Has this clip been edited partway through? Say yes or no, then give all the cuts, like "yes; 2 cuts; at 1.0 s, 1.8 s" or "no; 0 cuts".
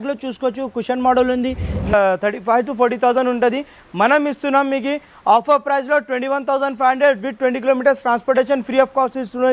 yes; 1 cut; at 1.9 s